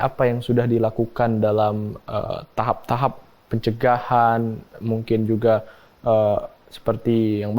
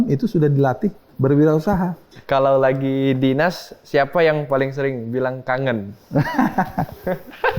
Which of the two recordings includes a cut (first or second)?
second